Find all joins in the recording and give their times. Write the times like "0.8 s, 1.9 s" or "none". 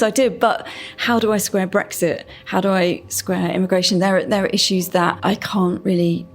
5.1 s